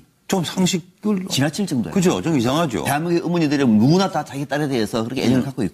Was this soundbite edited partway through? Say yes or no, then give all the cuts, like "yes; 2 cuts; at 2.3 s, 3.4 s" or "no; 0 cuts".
no; 0 cuts